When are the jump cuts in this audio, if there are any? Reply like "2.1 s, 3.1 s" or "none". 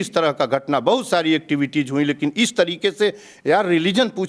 none